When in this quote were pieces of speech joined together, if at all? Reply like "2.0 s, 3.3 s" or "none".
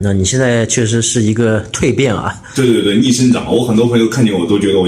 none